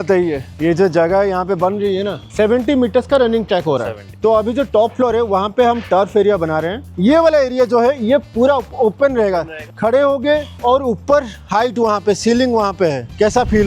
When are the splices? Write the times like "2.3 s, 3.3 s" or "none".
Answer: 2.2 s, 4.1 s, 6.9 s, 9.7 s